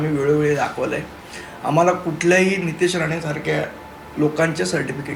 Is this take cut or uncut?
uncut